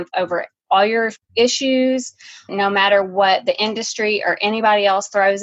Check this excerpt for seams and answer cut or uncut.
cut